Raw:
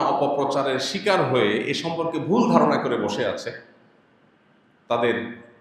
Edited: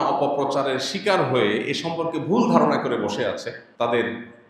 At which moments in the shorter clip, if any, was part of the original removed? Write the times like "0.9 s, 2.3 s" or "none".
3.6 s